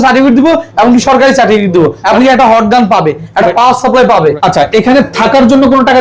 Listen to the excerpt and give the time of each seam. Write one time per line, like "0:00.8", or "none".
0:02.0
0:04.4